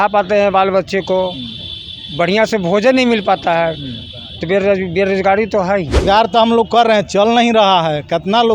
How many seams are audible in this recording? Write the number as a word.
one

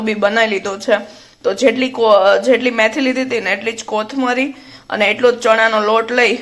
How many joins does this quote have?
zero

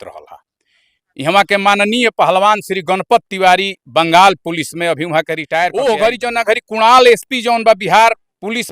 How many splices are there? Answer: one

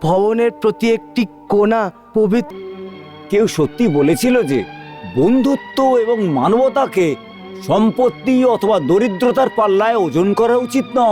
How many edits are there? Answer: one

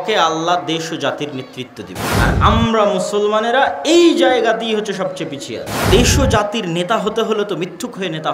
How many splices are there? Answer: two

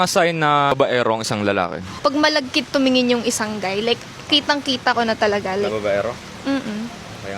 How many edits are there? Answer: two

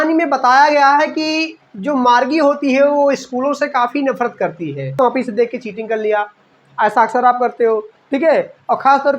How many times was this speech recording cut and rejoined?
one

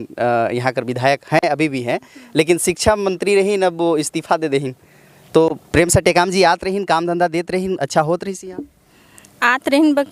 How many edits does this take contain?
zero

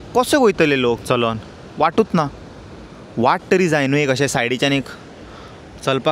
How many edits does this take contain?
one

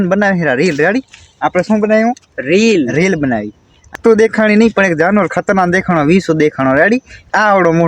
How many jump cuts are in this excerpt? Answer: one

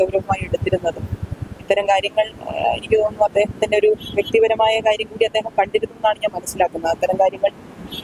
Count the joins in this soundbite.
zero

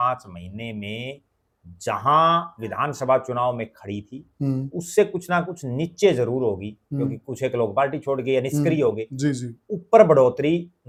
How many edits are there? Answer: zero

